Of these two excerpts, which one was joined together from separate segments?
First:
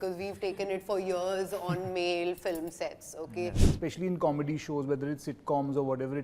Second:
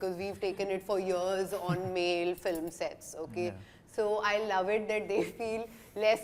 first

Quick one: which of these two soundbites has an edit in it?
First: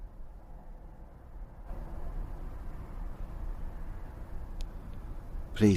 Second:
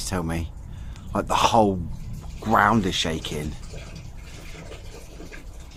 first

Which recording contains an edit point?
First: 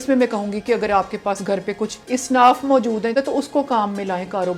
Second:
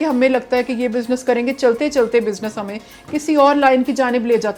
first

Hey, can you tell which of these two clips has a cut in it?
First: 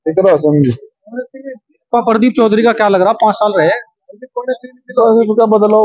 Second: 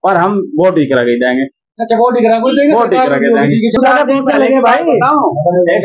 second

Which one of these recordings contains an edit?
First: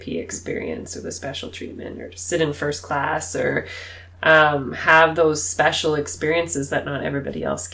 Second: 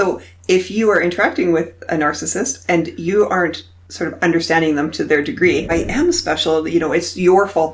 second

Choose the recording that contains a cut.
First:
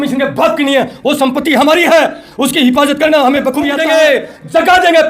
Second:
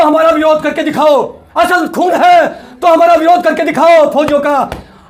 first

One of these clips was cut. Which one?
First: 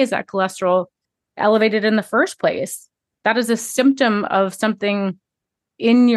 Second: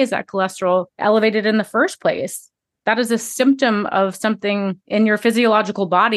second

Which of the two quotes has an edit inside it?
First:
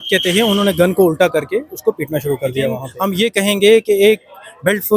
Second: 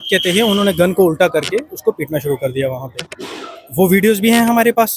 first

